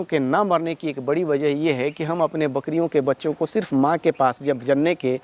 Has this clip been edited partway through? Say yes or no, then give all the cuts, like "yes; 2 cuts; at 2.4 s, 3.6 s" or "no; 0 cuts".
no; 0 cuts